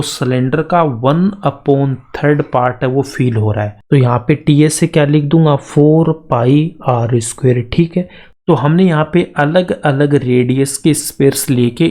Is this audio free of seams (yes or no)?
no